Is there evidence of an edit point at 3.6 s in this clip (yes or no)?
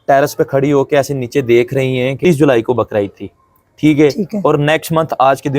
no